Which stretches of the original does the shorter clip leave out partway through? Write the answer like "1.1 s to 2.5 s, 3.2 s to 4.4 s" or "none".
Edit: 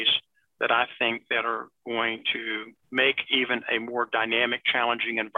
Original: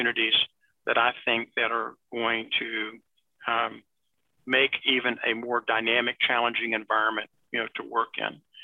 3.0 s to 4.3 s